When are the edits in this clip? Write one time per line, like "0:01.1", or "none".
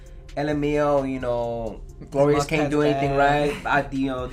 none